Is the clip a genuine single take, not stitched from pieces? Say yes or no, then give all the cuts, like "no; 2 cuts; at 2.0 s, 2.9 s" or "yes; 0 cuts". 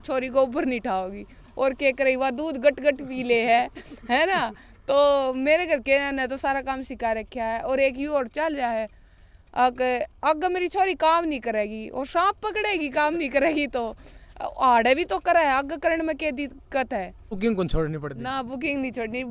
no; 1 cut; at 17.4 s